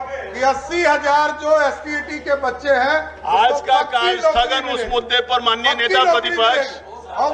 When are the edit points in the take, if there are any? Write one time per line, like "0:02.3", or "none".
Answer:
none